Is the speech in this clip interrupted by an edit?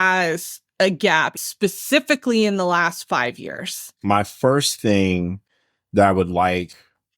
yes; 2 cuts; at 1.4 s, 3.8 s

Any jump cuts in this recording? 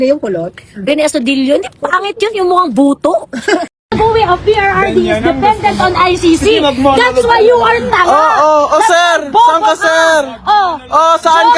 yes; 1 cut; at 3.7 s

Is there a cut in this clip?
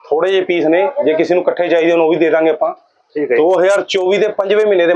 no; 0 cuts

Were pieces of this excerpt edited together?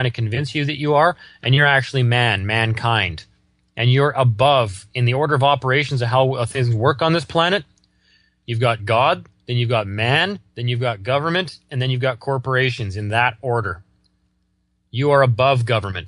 yes; 1 cut; at 11.0 s

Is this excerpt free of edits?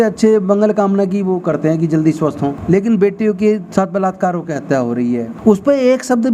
no; 2 cuts; at 2.6 s, 5.3 s

